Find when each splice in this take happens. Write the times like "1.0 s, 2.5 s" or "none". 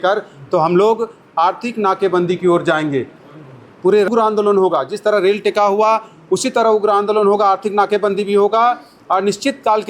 4.1 s